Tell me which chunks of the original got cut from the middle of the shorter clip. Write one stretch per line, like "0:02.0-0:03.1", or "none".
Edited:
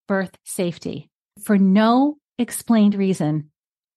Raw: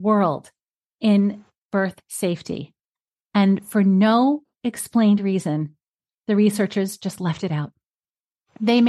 0:03.0-0:03.7